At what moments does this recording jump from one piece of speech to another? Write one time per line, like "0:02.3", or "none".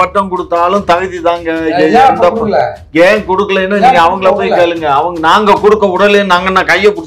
none